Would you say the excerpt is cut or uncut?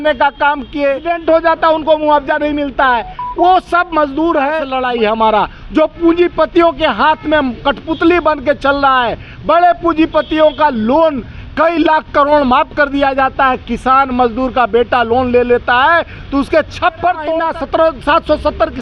cut